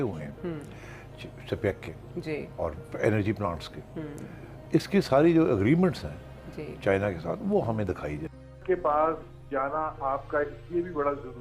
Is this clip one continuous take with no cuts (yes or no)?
no